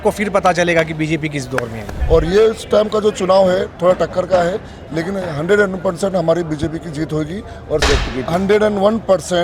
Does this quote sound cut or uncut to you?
cut